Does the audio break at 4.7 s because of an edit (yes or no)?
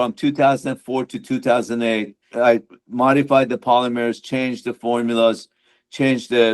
no